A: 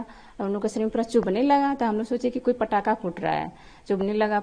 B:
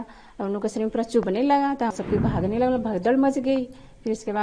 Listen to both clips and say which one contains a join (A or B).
B